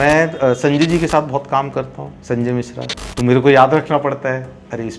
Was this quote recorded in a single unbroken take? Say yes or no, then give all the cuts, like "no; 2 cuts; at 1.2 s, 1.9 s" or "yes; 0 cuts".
no; 1 cut; at 3.0 s